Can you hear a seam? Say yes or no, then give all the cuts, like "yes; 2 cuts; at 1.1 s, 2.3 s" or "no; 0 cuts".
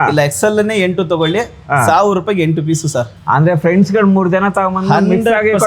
no; 0 cuts